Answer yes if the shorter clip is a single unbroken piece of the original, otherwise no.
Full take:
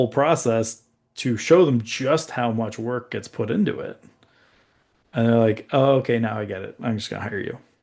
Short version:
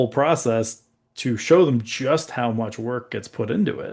yes